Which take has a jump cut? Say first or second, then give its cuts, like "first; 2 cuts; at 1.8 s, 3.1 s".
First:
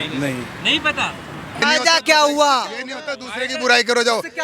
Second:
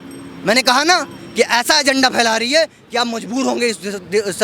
first; 1 cut; at 1.6 s